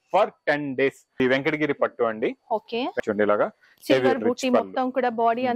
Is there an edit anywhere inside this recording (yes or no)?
yes